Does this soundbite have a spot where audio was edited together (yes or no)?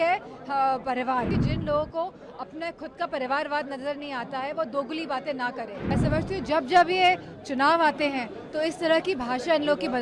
yes